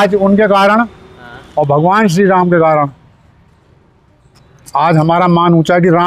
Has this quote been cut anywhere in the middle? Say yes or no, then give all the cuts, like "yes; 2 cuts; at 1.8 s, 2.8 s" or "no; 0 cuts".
no; 0 cuts